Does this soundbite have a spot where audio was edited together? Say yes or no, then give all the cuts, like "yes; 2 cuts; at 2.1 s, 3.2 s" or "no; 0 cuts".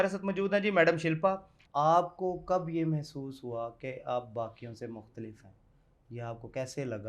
yes; 1 cut; at 1.6 s